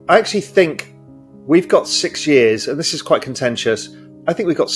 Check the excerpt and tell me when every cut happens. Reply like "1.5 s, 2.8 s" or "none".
none